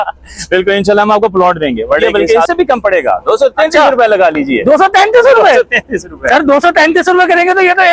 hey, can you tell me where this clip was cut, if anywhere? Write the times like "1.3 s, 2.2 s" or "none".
2.0 s